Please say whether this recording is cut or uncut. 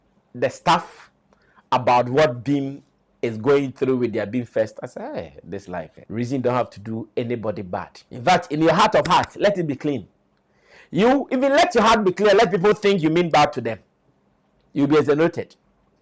cut